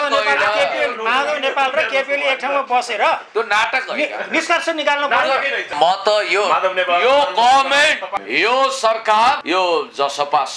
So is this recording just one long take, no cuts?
no; 3 cuts; at 5.7 s, 8.2 s, 9.4 s

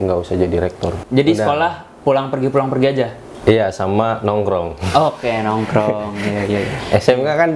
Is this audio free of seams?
no; 1 cut; at 1.0 s

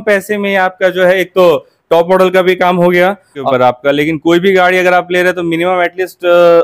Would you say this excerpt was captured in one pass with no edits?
yes; 0 cuts

